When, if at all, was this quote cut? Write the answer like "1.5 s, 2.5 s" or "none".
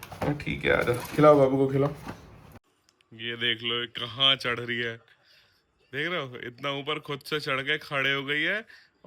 2.4 s